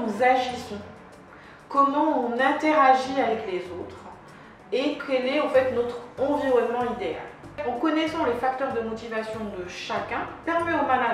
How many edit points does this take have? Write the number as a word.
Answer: one